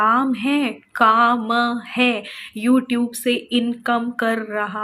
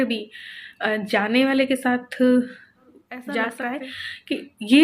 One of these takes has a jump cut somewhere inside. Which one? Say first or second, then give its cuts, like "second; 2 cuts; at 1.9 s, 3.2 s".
second; 1 cut; at 3.4 s